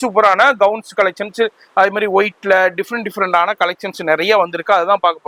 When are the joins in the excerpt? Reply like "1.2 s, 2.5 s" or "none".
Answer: none